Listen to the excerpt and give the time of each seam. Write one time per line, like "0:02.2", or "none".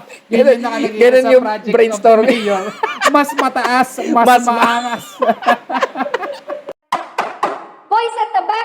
0:06.7